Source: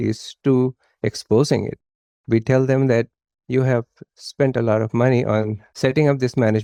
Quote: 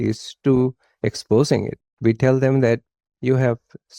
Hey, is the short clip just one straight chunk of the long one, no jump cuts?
no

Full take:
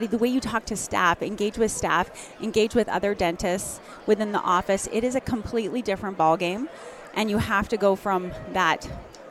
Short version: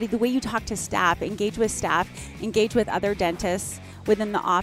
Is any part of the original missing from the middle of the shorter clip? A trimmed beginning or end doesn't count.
no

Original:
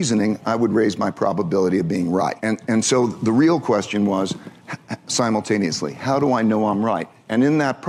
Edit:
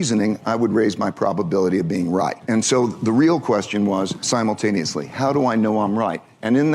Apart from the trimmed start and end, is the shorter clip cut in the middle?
yes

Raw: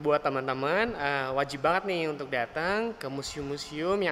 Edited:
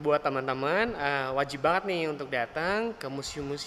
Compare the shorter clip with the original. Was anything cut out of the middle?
no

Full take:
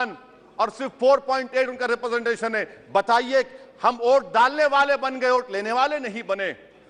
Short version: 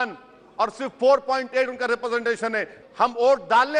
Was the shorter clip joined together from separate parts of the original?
yes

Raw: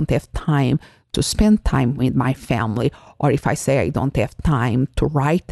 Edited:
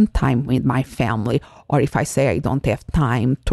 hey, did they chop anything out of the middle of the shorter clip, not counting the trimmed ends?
no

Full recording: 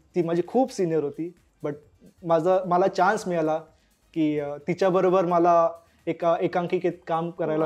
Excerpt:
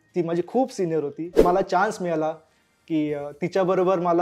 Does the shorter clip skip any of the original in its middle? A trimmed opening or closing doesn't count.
yes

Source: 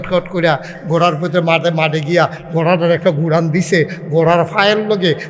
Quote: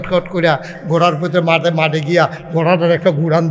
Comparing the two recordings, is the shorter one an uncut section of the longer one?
yes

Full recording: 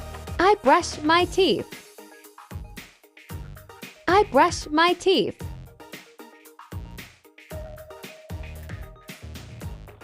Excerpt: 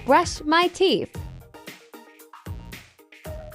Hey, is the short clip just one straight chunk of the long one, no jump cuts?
no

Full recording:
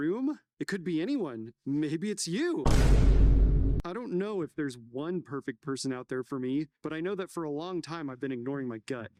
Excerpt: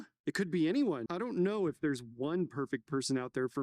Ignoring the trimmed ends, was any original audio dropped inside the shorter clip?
yes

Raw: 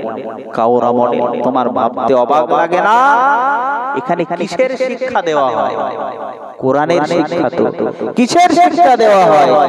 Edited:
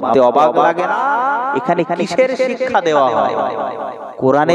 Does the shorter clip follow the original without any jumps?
no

